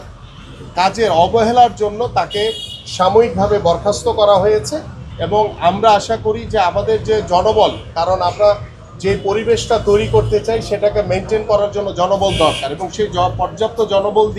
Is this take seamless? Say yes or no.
yes